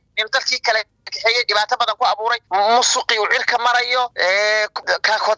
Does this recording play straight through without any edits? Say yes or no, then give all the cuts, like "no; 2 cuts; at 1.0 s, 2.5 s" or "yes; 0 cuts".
no; 2 cuts; at 2.4 s, 4.5 s